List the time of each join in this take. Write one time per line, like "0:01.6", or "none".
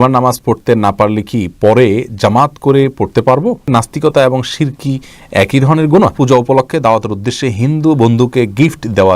0:03.7
0:06.1